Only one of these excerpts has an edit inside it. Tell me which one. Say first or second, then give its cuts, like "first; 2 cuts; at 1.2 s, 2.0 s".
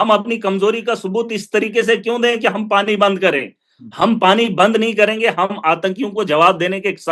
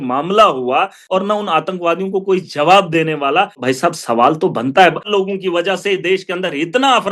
second; 3 cuts; at 1.0 s, 3.6 s, 5.1 s